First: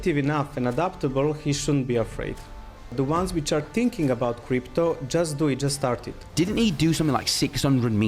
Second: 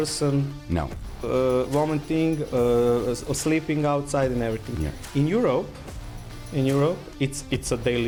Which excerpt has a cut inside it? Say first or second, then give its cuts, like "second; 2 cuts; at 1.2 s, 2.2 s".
first; 2 cuts; at 2.9 s, 6.2 s